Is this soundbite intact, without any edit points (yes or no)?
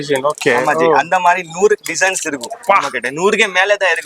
yes